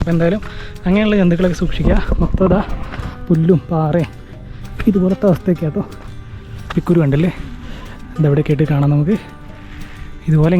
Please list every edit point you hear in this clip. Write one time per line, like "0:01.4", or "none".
0:06.7